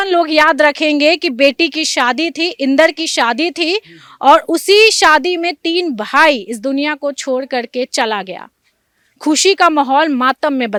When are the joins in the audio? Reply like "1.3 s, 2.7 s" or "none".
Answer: none